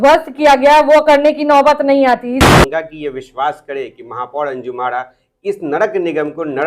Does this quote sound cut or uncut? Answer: cut